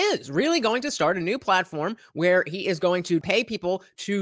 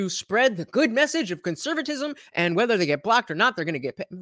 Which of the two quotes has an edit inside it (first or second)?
first